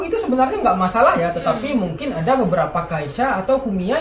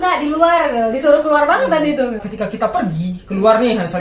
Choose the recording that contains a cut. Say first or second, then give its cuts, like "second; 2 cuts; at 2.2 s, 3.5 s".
second; 1 cut; at 2.2 s